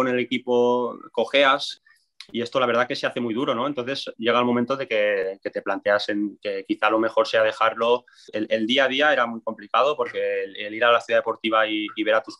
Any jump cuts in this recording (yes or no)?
yes